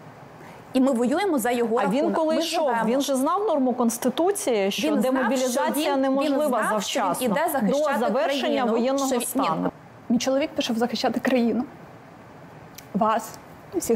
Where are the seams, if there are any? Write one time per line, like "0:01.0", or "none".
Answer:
0:09.7